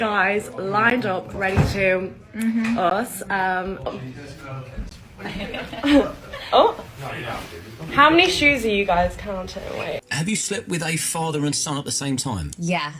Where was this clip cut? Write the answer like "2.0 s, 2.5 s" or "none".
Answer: 10.1 s